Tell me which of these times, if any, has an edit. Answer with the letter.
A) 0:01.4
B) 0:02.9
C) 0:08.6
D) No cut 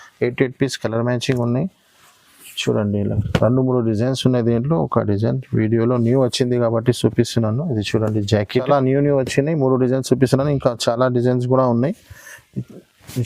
C